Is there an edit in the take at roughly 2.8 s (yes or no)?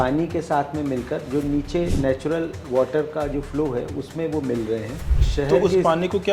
no